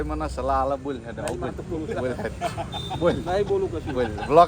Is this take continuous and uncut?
yes; 0 cuts

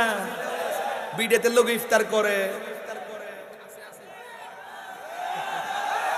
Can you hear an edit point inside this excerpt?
no; 0 cuts

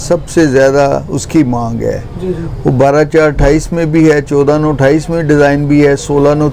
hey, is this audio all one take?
yes; 0 cuts

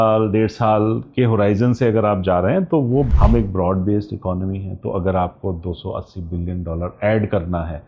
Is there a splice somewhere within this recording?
yes; 1 cut; at 3.1 s

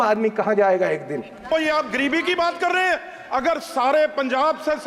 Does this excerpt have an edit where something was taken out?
yes; 1 cut; at 1.5 s

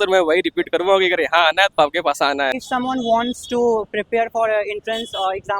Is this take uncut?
no; 1 cut; at 2.5 s

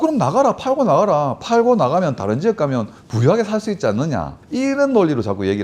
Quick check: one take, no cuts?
yes; 0 cuts

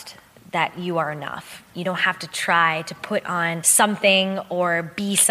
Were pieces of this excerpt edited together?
yes; 2 cuts; at 1.7 s, 3.6 s

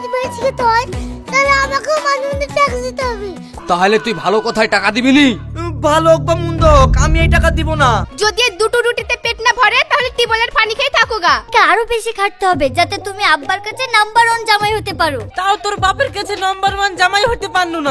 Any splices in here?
yes; 4 cuts; at 3.5 s, 8.1 s, 11.5 s, 15.3 s

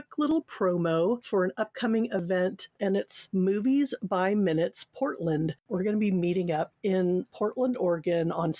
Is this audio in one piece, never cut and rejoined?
no; 2 cuts; at 2.7 s, 5.6 s

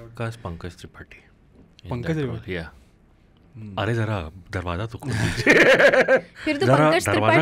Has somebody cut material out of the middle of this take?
no; 0 cuts

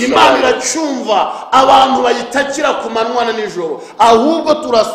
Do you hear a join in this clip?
no; 0 cuts

